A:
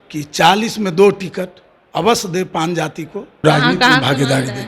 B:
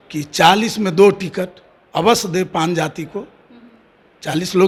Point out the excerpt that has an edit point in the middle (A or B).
A